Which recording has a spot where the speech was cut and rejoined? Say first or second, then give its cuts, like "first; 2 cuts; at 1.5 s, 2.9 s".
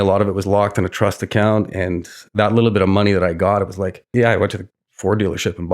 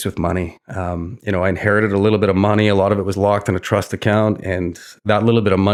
first; 1 cut; at 4.1 s